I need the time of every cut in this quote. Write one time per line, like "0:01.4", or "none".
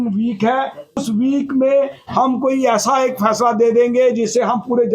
0:01.0